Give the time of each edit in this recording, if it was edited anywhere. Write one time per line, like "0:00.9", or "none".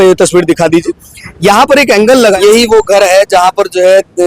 0:02.4